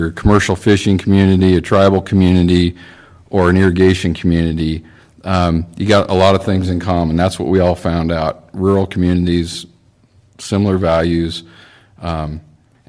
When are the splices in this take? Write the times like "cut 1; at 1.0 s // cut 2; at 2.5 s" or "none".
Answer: none